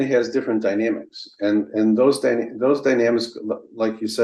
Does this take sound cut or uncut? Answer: uncut